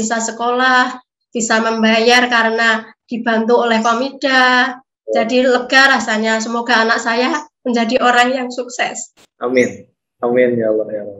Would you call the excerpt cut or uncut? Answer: uncut